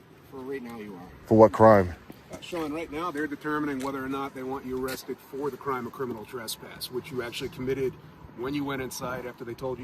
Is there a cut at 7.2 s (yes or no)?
no